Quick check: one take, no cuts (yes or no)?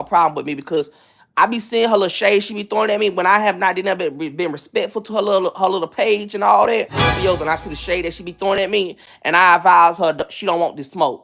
no